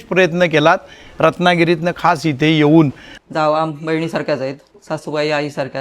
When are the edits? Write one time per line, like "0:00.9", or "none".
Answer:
0:03.1
0:04.7